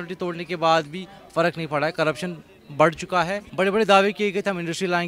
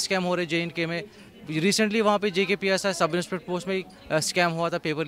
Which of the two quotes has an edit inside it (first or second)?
first